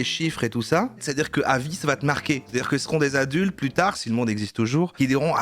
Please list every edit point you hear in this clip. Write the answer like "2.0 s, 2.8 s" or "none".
1.0 s